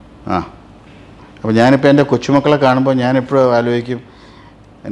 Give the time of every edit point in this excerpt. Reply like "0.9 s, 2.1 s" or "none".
none